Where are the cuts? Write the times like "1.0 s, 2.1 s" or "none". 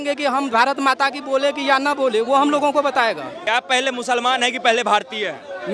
3.4 s